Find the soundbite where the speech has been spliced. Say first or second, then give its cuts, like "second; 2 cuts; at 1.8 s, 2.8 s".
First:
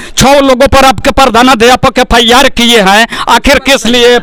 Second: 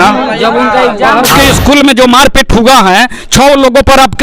second; 1 cut; at 1.3 s